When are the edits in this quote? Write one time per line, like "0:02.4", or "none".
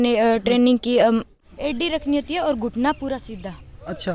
0:01.3